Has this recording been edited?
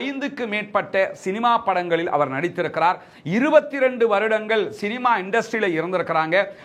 no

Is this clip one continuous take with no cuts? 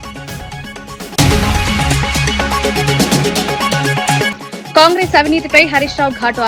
yes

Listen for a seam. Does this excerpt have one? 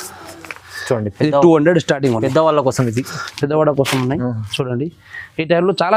no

